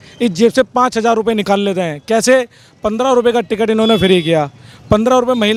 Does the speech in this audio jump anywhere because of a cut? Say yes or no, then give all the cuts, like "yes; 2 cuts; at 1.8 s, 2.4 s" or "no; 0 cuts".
no; 0 cuts